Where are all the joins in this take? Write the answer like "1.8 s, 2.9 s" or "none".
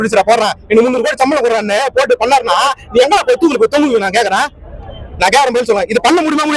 none